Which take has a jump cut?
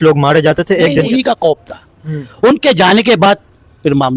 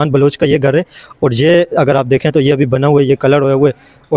first; 1 cut; at 1.1 s

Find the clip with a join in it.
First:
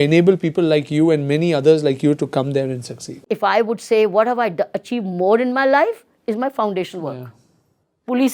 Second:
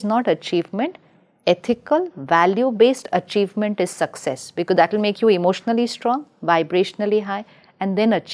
first; 1 cut; at 3.2 s

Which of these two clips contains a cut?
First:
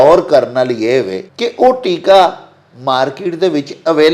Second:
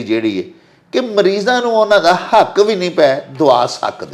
first; 1 cut; at 1.2 s

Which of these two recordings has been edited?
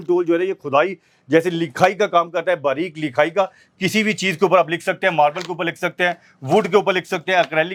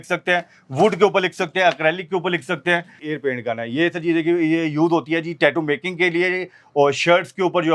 second; 1 cut; at 3.0 s

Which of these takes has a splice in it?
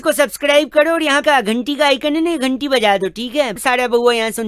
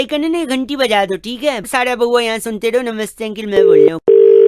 second; 1 cut; at 3.6 s

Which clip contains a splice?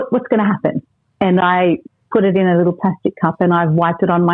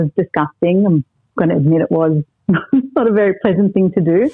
first; 1 cut; at 1.0 s

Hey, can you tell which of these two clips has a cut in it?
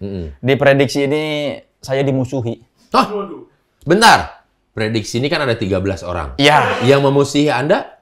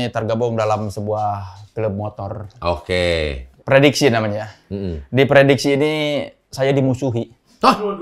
second; 1 cut; at 3.5 s

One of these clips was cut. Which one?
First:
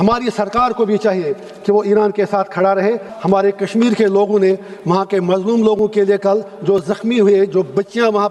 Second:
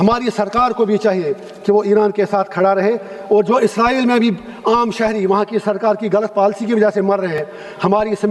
first; 1 cut; at 3.1 s

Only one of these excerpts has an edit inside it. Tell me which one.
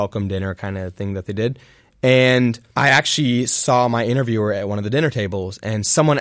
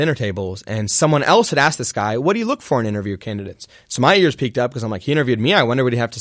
first; 1 cut; at 2.6 s

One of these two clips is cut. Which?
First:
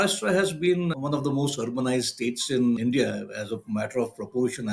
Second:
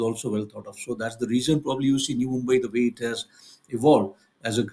first; 2 cuts; at 0.9 s, 2.8 s

